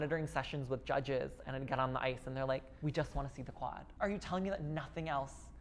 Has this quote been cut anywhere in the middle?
yes; 2 cuts; at 2.7 s, 3.8 s

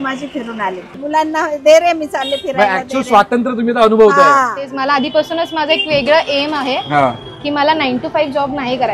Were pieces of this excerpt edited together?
yes; 2 cuts; at 1.0 s, 4.6 s

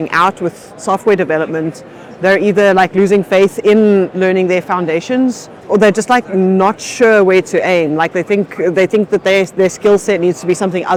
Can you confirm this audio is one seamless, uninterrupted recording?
yes; 0 cuts

